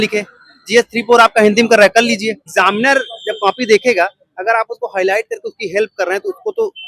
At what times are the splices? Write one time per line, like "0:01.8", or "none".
0:02.4